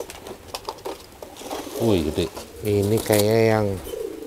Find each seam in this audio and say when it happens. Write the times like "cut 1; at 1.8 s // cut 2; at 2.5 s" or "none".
cut 1; at 2.5 s